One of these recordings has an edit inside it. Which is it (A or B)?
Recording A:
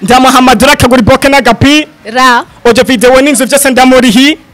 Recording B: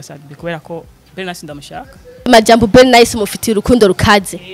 B